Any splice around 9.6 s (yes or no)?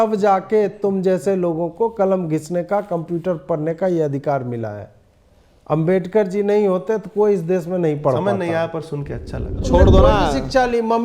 yes